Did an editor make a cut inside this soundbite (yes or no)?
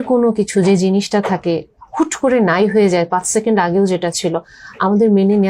no